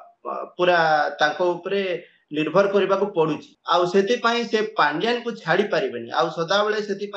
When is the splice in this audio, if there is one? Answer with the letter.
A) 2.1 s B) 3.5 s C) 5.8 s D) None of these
B